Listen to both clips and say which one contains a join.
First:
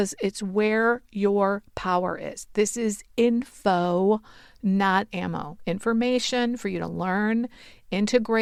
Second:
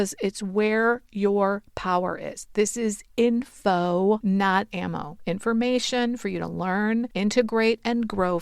second; 2 cuts; at 4.2 s, 7.1 s

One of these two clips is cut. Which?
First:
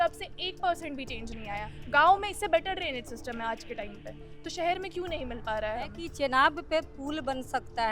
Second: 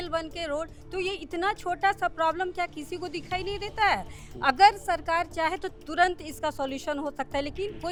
first; 2 cuts; at 1.7 s, 6.0 s

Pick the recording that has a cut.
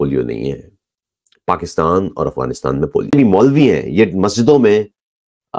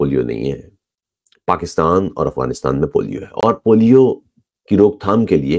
first; 1 cut; at 3.1 s

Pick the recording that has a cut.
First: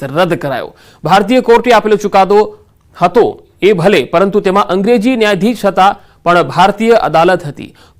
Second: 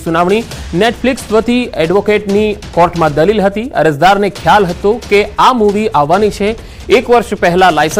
first; 1 cut; at 4.8 s

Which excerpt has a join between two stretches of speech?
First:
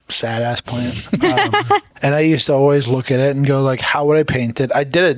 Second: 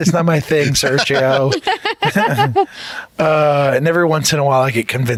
first; 1 cut; at 1.9 s

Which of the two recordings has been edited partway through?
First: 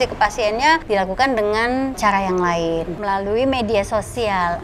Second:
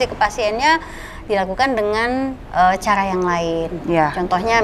first; 3 cuts; at 0.8 s, 2.0 s, 2.9 s

